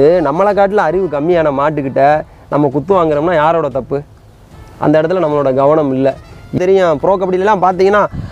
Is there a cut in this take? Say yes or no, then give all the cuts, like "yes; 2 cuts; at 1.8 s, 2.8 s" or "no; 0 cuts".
yes; 1 cut; at 6.5 s